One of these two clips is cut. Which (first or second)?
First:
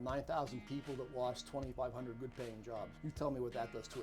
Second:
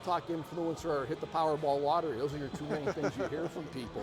first